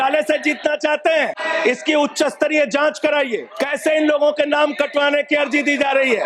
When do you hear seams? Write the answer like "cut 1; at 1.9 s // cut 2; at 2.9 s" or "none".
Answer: cut 1; at 1.4 s // cut 2; at 3.5 s